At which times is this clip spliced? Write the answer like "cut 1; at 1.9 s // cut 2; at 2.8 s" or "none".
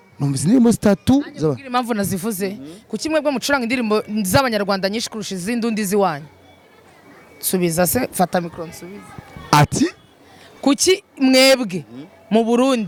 none